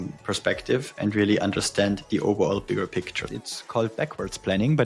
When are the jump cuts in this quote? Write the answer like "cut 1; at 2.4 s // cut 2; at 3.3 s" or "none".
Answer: cut 1; at 3.2 s